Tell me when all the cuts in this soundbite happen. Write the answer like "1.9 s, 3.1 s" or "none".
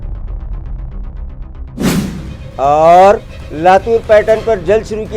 2.3 s